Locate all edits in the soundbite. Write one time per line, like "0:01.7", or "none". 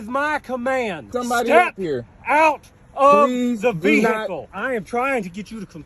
0:01.0
0:04.4